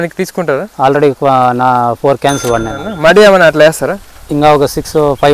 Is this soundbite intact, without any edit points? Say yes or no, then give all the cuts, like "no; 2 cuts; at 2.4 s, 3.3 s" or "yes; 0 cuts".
no; 1 cut; at 2.8 s